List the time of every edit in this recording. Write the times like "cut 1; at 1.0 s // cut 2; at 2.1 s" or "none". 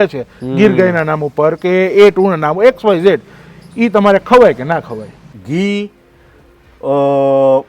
cut 1; at 5.2 s